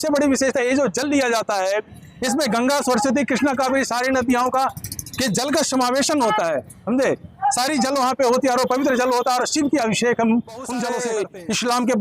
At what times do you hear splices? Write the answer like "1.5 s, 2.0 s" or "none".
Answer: 10.9 s